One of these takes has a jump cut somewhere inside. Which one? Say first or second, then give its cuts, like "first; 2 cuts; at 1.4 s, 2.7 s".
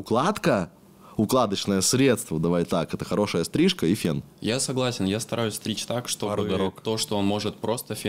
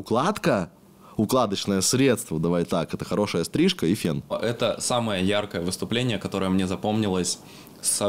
second; 1 cut; at 4.4 s